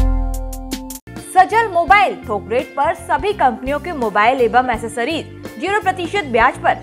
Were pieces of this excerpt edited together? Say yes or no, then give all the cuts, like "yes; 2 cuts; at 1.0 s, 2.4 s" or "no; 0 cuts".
no; 0 cuts